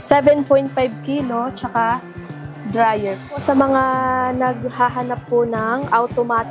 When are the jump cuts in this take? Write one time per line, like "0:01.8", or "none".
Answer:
0:03.4